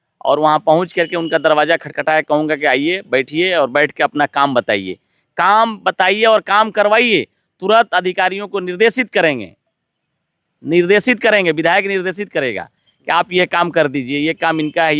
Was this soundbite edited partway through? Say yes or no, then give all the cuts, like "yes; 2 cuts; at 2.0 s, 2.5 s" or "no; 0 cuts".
no; 0 cuts